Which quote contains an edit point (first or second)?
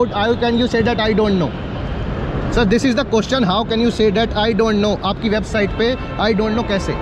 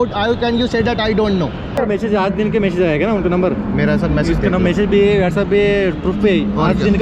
second